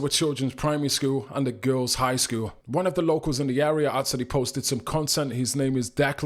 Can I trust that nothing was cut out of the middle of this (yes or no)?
yes